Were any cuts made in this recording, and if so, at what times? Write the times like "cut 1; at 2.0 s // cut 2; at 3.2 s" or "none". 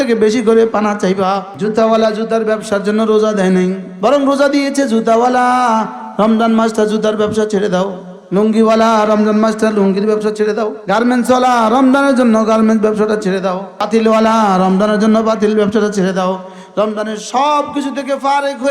cut 1; at 1.5 s // cut 2; at 3.9 s